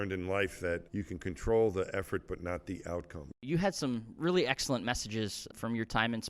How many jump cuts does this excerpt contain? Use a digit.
3